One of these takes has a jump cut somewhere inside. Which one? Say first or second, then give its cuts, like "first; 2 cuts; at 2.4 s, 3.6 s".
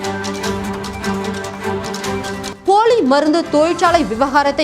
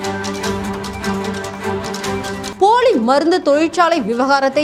first; 1 cut; at 2.5 s